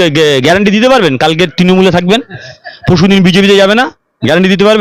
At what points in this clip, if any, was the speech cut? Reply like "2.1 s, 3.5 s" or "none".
none